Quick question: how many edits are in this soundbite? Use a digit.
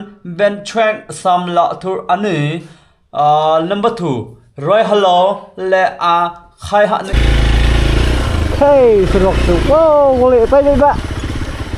1